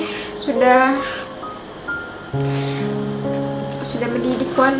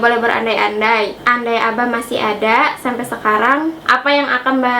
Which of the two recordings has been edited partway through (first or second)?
second